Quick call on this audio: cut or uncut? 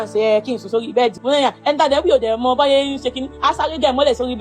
cut